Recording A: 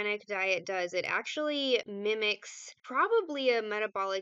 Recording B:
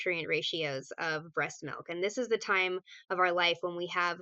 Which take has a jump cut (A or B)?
A